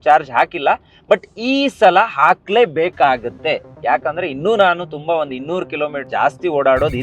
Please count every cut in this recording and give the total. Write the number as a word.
one